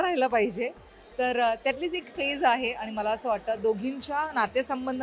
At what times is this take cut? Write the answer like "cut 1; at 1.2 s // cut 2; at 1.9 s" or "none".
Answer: none

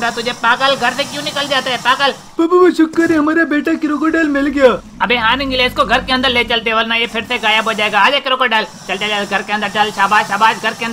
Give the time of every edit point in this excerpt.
none

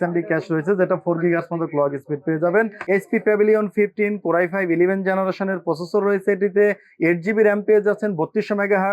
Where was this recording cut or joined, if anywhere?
cut 1; at 2.8 s

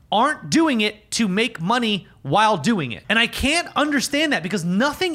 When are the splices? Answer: cut 1; at 3.0 s

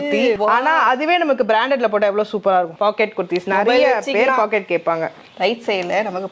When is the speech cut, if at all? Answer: cut 1; at 2.7 s

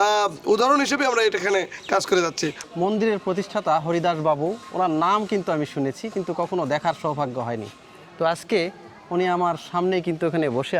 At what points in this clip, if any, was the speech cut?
cut 1; at 2.6 s

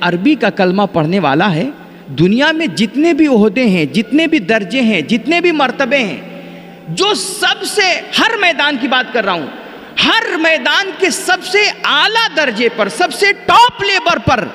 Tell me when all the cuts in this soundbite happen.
none

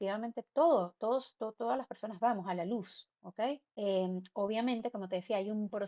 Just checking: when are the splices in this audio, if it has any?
none

